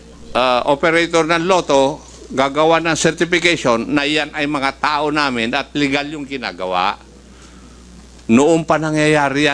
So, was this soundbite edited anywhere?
no; 0 cuts

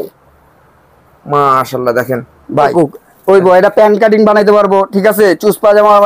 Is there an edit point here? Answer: yes; 1 cut; at 2.7 s

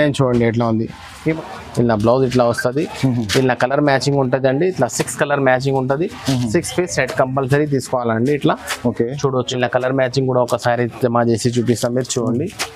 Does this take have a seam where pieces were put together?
yes; 2 cuts; at 1.3 s, 9.5 s

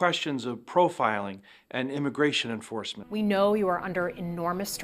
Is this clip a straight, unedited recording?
no; 1 cut; at 3.0 s

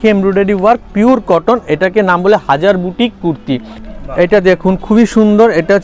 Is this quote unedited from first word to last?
no; 1 cut; at 3.8 s

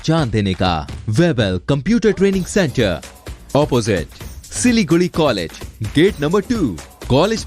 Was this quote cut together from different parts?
yes; 1 cut; at 0.9 s

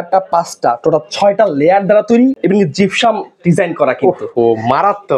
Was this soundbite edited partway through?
no; 0 cuts

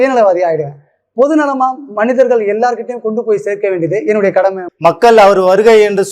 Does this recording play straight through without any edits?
no; 1 cut; at 4.7 s

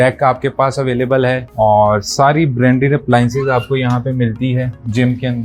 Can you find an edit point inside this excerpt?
no; 0 cuts

